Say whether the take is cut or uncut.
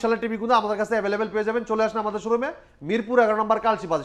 uncut